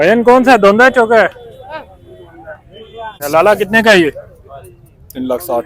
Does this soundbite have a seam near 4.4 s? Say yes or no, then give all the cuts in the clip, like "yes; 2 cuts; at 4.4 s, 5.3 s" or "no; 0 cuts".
no; 1 cut; at 3.1 s